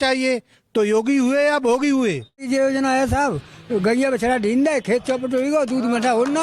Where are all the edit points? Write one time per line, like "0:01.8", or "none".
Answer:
0:02.5